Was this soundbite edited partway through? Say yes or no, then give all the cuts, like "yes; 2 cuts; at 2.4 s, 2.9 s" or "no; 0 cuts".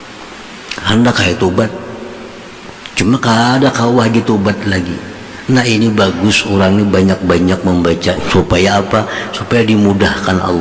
yes; 1 cut; at 8.2 s